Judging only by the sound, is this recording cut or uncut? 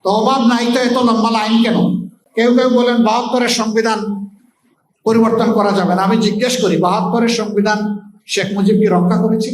cut